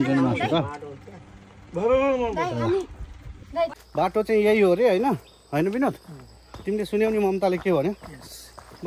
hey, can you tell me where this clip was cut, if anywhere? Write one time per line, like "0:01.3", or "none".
0:03.8